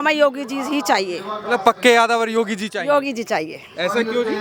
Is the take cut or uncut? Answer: uncut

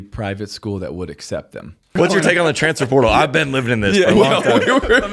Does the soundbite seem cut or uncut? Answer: cut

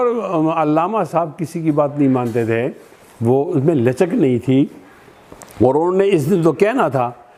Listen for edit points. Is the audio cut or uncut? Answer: uncut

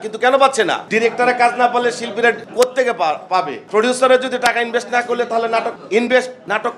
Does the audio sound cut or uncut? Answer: uncut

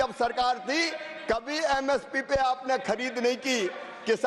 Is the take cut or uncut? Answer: uncut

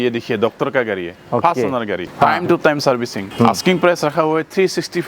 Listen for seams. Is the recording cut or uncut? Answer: cut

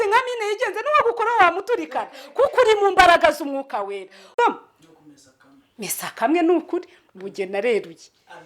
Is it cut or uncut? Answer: cut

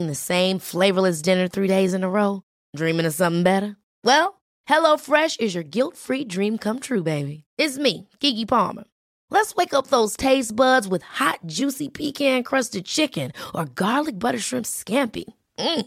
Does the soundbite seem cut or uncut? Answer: uncut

